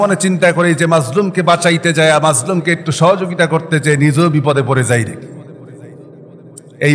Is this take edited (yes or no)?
no